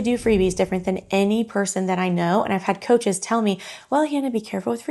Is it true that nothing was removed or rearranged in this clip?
yes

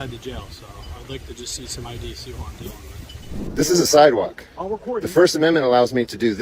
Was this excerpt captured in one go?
no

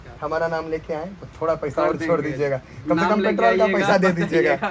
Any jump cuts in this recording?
no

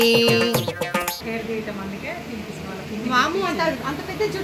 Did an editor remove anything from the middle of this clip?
no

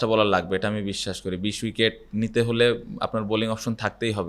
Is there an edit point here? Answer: no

